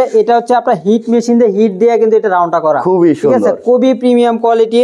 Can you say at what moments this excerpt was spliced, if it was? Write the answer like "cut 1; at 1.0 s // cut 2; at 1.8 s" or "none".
none